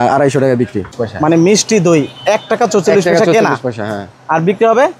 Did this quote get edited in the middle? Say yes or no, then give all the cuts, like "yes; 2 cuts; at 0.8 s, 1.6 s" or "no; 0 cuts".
yes; 1 cut; at 0.9 s